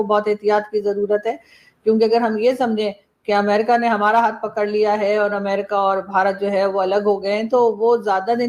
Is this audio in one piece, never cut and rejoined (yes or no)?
yes